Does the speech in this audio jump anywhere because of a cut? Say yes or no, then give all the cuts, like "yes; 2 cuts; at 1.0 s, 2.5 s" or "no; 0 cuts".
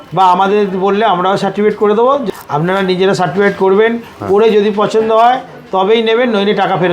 yes; 1 cut; at 2.3 s